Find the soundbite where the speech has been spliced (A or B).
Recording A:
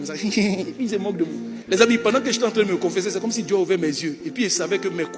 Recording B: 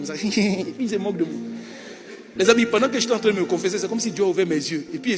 A